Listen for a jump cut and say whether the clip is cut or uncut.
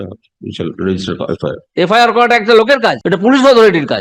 cut